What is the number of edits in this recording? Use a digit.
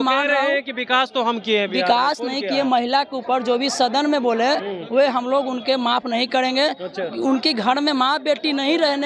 0